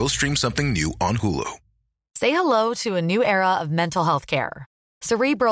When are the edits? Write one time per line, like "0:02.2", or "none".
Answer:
0:02.0